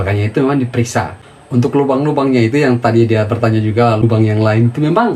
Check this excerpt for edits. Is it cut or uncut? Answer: cut